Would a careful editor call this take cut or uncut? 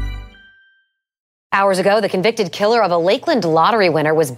cut